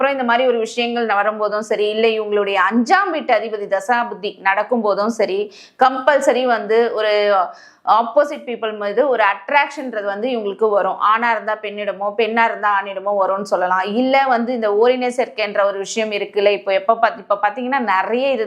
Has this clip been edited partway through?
no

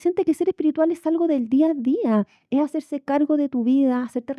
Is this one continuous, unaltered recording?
yes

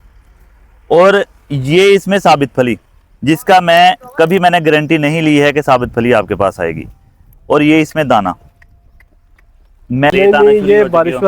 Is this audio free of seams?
no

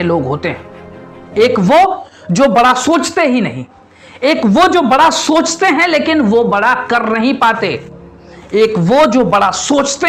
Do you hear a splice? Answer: no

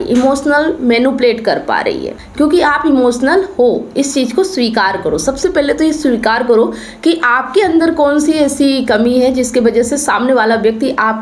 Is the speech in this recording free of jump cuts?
yes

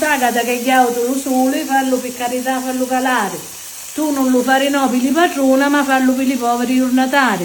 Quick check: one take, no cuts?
yes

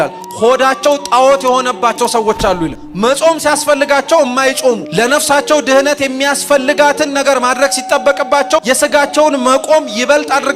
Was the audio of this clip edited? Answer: yes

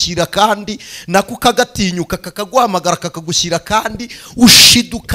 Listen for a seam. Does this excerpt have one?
no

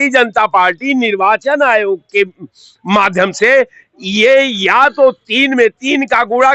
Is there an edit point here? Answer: no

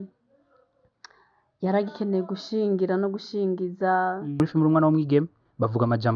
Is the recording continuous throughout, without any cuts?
no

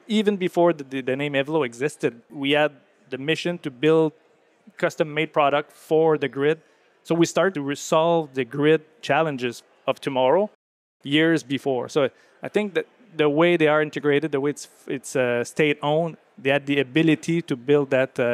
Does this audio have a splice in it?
yes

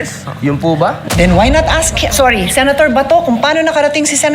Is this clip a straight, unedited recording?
no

